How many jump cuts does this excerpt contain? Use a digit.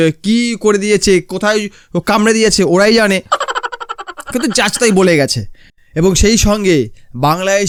0